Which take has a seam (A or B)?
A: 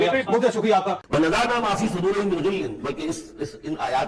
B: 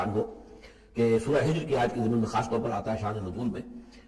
A